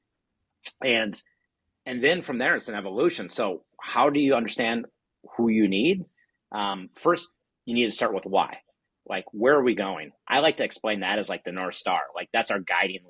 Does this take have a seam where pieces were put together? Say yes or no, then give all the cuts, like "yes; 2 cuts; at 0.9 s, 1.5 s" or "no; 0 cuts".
yes; 1 cut; at 10.1 s